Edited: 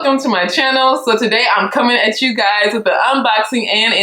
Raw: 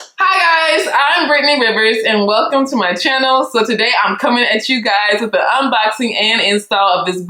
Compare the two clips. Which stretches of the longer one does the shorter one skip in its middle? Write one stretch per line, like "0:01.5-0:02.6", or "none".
none